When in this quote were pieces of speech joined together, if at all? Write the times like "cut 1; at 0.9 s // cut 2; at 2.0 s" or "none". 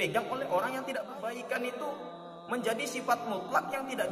cut 1; at 1.1 s